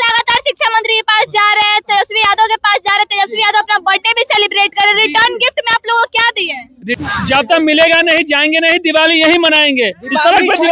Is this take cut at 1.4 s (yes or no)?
no